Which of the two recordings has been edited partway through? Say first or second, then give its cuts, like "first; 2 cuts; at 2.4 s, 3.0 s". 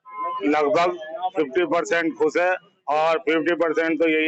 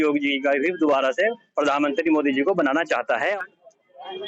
second; 1 cut; at 3.3 s